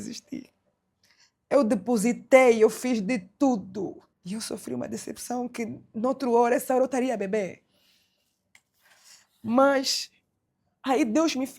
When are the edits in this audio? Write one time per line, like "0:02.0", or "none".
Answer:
0:04.1